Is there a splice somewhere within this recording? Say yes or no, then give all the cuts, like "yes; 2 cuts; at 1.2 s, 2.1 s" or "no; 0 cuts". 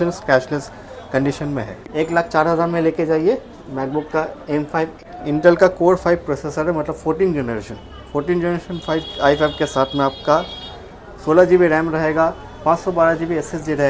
yes; 2 cuts; at 1.8 s, 5.0 s